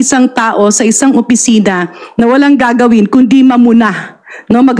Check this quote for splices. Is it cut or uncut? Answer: uncut